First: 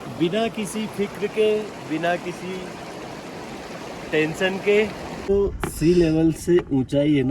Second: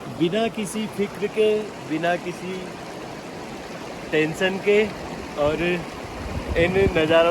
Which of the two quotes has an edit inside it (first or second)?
first